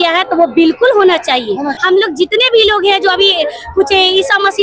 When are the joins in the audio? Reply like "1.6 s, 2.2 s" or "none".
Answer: 1.7 s